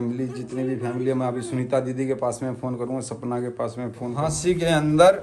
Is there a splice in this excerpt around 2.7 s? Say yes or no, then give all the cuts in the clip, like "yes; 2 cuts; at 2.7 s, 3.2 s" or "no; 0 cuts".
no; 1 cut; at 4.2 s